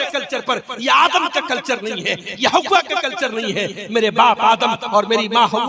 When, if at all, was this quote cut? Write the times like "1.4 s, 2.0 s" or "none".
none